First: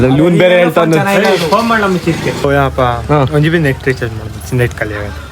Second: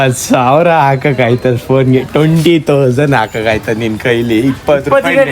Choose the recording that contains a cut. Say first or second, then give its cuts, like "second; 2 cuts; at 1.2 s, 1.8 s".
first; 1 cut; at 2.4 s